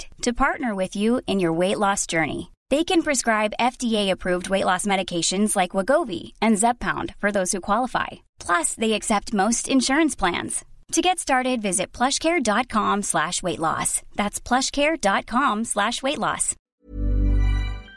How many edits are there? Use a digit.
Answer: 1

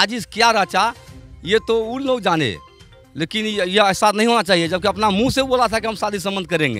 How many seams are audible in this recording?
0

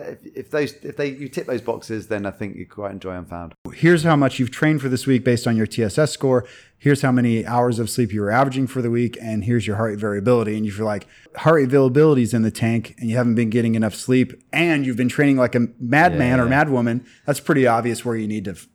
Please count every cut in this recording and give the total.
2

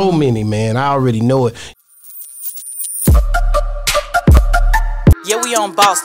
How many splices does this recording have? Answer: 1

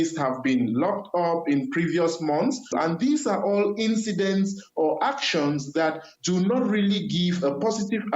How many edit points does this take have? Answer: 0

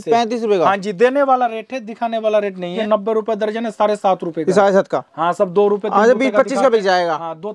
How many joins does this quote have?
1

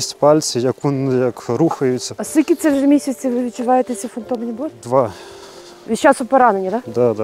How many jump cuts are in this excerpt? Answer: 1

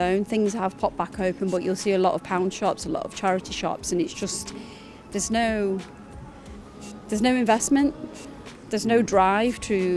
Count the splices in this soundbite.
0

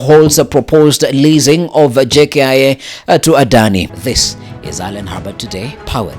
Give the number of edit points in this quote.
1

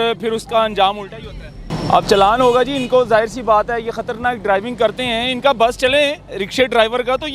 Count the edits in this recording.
1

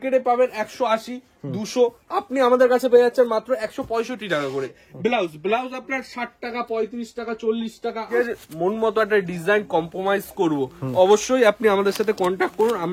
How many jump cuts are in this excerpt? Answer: 2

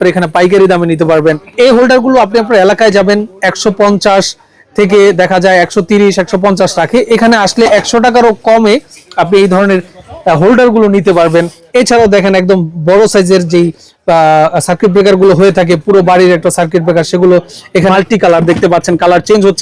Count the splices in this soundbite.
3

